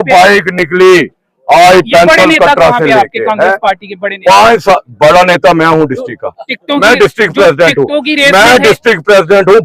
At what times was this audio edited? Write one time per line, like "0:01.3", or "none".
none